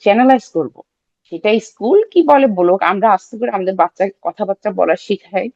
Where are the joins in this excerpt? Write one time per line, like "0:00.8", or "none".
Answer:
none